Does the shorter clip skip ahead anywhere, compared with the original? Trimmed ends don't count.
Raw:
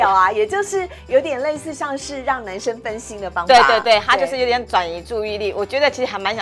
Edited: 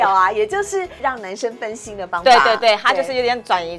yes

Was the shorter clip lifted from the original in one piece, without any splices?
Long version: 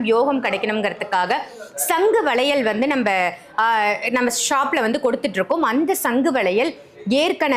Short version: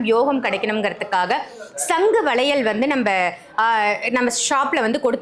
yes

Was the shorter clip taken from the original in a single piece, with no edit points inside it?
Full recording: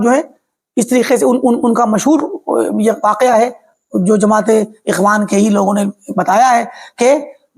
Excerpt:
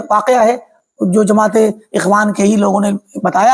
yes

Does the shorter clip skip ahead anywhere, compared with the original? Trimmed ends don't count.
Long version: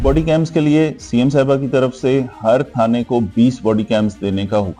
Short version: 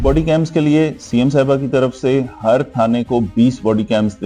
no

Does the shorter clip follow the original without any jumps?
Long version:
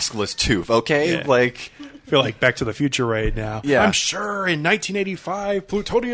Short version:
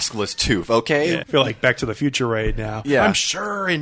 no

